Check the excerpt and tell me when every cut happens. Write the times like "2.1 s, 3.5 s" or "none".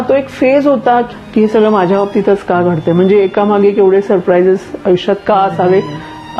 1.1 s